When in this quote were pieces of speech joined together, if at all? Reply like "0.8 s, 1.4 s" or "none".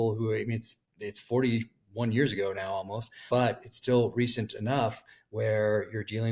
3.2 s